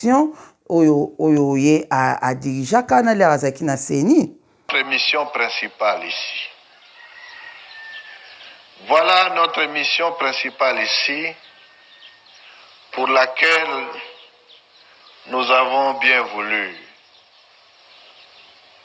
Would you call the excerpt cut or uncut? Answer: cut